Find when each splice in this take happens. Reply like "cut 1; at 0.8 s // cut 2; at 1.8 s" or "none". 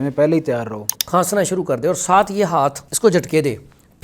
cut 1; at 0.9 s // cut 2; at 2.9 s